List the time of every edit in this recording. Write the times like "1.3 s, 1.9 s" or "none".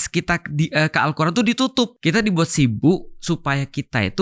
2.0 s

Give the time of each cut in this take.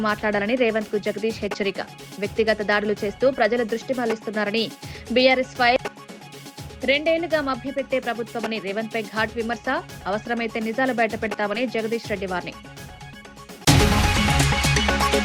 none

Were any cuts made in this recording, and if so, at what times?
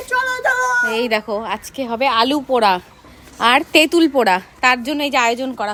none

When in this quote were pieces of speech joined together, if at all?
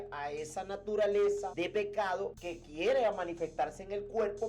1.5 s, 2.5 s

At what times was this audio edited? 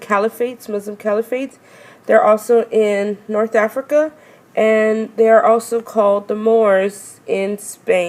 none

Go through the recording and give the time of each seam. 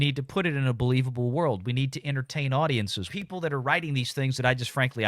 3.1 s

